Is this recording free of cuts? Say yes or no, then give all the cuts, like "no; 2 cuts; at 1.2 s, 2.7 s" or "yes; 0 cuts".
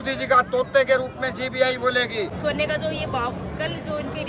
no; 1 cut; at 2.3 s